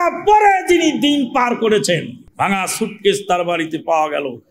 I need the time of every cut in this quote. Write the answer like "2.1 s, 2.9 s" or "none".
2.2 s